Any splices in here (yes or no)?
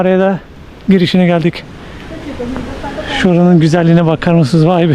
no